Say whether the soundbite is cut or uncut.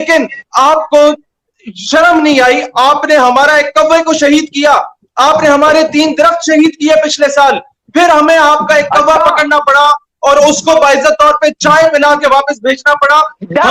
uncut